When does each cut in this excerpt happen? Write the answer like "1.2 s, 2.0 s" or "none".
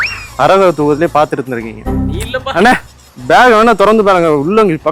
2.2 s

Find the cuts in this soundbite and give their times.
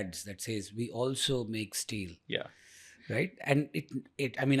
none

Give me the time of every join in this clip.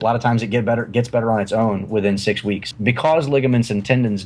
2.7 s

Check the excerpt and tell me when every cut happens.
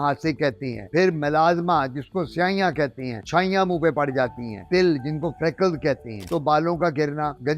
4.6 s, 6.2 s

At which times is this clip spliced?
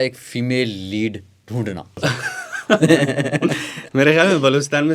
2.0 s

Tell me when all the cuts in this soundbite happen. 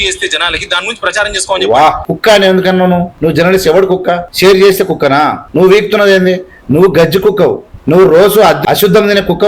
2.1 s, 3.1 s, 4.3 s, 5.4 s, 7.7 s, 8.6 s

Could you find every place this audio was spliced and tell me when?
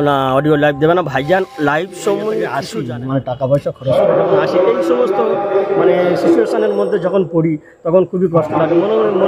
2.6 s

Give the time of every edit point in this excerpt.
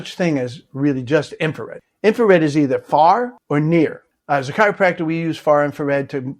4.1 s

